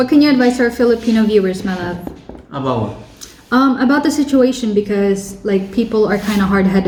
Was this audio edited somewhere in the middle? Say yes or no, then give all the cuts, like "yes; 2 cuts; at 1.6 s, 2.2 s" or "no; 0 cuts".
no; 0 cuts